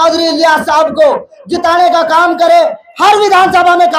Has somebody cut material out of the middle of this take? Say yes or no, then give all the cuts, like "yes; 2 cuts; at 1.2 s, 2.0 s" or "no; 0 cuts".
no; 0 cuts